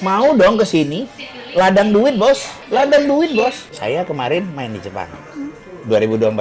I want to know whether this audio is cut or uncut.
cut